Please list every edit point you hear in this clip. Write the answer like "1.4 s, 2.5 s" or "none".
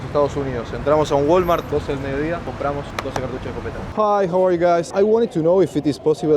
3.9 s